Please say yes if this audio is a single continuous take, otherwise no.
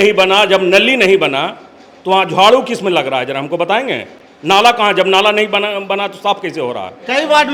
yes